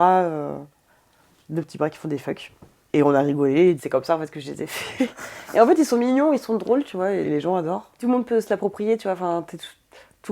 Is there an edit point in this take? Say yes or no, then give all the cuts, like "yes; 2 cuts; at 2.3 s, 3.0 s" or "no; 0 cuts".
yes; 1 cut; at 7.9 s